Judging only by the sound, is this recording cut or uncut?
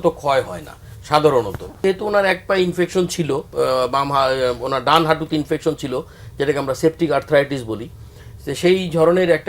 cut